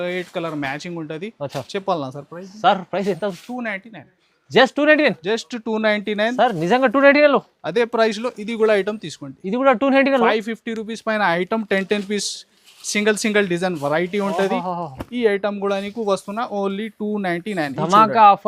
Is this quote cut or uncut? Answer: uncut